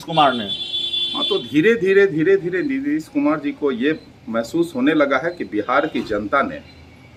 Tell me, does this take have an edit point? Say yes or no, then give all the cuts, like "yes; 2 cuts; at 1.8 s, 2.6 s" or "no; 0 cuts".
no; 0 cuts